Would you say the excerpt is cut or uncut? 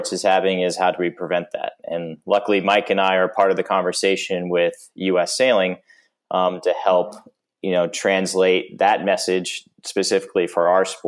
uncut